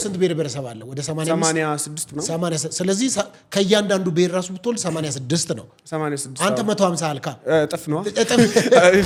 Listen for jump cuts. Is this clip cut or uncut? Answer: uncut